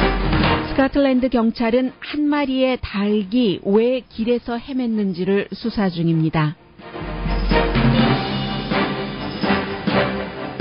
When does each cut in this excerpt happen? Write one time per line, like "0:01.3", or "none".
0:03.5